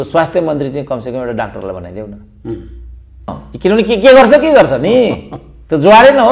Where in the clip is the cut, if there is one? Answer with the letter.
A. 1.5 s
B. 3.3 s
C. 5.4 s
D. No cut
B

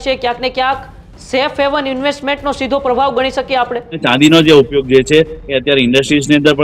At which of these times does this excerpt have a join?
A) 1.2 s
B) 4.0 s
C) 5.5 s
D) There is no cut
B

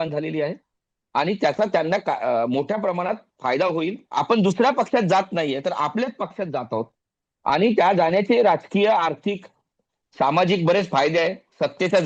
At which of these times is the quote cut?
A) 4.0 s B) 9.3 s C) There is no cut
A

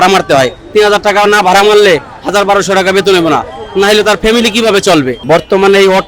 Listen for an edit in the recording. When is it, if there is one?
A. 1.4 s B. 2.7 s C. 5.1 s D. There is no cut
C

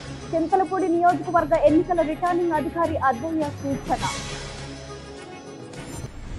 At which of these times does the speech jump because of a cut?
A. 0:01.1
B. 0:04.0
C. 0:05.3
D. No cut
D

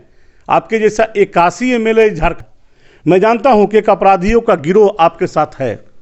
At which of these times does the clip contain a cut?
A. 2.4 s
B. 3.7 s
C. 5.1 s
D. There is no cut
A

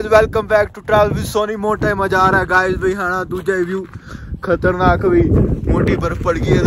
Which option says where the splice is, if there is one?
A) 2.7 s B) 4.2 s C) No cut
C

